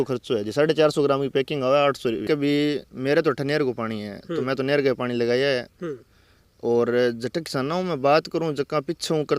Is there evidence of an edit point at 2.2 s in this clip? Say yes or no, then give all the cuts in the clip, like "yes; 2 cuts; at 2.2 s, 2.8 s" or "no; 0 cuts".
yes; 1 cut; at 2.2 s